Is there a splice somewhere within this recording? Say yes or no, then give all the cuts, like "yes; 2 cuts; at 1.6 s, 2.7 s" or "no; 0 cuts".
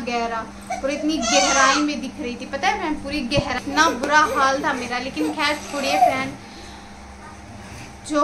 no; 0 cuts